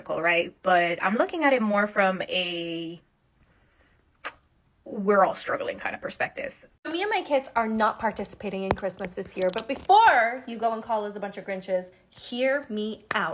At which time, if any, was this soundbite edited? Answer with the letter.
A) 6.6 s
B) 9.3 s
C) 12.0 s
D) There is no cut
A